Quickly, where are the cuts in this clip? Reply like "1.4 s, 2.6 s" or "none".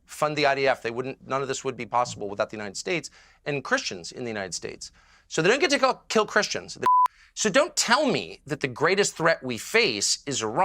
6.7 s